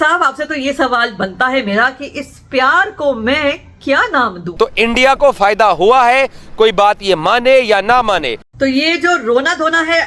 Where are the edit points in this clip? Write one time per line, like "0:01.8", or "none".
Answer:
0:04.4
0:08.5